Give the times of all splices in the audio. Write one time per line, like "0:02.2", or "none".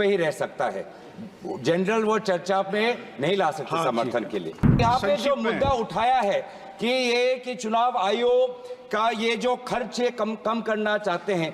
0:04.8